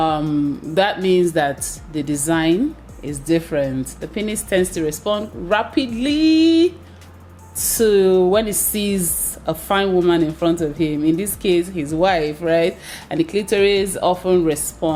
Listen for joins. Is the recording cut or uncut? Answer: uncut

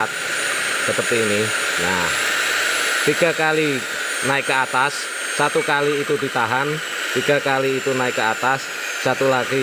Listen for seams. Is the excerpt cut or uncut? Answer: uncut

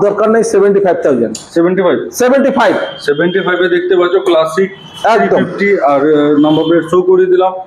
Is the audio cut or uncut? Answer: uncut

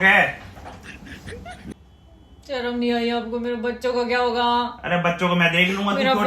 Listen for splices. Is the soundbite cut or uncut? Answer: cut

